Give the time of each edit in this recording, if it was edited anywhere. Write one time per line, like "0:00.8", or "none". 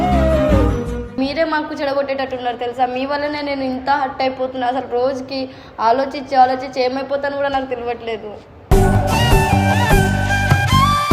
0:01.2